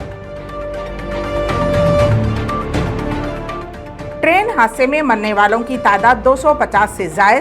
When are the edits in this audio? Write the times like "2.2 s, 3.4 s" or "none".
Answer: none